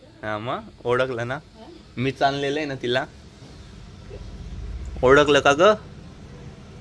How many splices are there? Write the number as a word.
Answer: zero